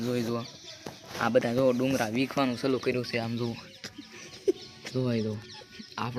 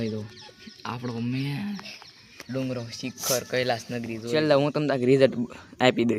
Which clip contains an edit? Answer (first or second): second